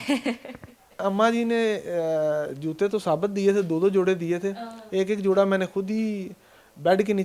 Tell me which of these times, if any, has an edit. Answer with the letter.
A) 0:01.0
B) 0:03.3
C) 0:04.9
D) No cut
A